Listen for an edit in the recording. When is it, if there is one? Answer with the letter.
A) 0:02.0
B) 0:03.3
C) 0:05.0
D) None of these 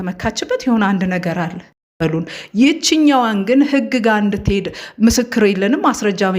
A